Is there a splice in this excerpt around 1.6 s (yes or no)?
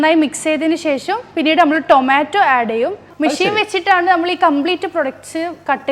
no